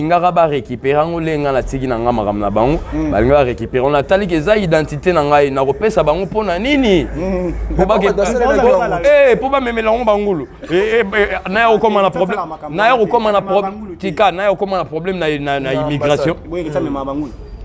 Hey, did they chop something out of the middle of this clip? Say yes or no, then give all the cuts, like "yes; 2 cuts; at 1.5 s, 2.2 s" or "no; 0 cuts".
no; 0 cuts